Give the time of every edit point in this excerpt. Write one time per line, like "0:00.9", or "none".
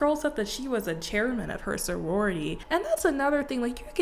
0:02.6